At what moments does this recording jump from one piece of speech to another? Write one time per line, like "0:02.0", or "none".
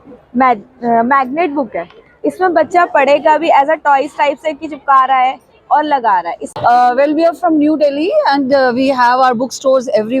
0:06.4